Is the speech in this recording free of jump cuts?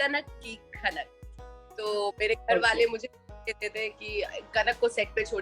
no; 1 cut; at 1.7 s

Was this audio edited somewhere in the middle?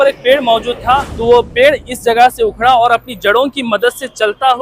yes; 1 cut; at 1.1 s

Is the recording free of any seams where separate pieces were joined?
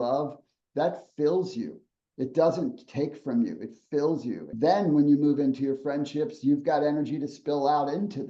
no; 1 cut; at 4.4 s

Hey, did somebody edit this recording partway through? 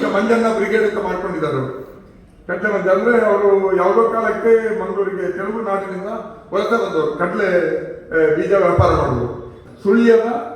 yes; 1 cut; at 9.5 s

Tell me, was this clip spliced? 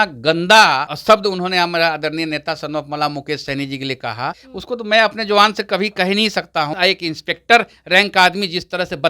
yes; 3 cuts; at 0.9 s, 4.5 s, 6.7 s

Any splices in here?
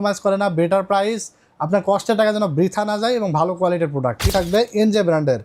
yes; 1 cut; at 4.3 s

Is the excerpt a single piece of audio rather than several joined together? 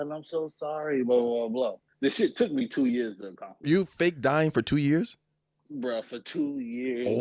no; 2 cuts; at 1.8 s, 3.5 s

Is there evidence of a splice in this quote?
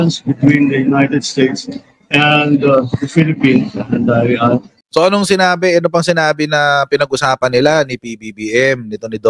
yes; 1 cut; at 4.8 s

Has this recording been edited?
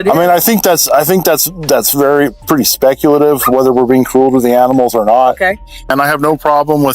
yes; 1 cut; at 5.9 s

